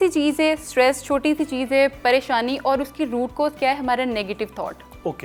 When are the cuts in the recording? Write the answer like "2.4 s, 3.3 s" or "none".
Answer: none